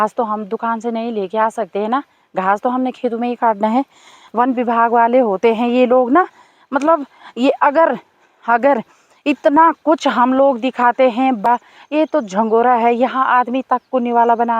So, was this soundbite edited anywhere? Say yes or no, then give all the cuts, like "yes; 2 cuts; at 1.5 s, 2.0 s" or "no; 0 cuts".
yes; 2 cuts; at 4.2 s, 11.5 s